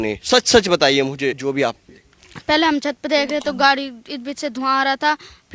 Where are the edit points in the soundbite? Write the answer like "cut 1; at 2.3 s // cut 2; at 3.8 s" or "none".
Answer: cut 1; at 1.4 s